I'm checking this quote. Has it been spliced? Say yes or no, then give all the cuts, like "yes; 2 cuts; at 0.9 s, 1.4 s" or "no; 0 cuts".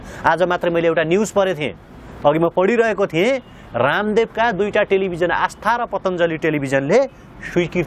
no; 0 cuts